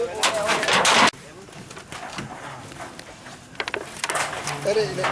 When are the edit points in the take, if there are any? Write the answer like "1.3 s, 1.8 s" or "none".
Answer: 1.1 s